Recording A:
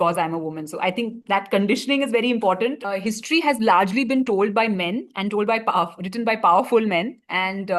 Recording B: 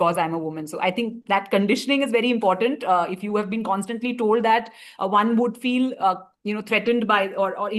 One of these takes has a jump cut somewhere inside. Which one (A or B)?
A